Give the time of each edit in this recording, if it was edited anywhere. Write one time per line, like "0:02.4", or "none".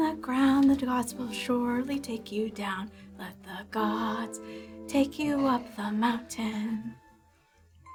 none